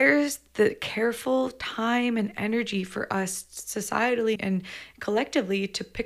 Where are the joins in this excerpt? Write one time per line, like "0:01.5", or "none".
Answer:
0:04.4